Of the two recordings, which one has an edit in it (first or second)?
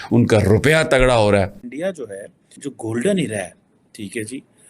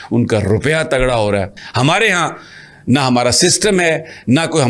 first